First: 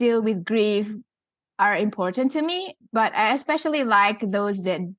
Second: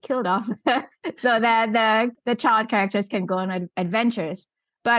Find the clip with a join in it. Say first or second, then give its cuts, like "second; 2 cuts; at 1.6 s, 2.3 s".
second; 2 cuts; at 2.1 s, 3.7 s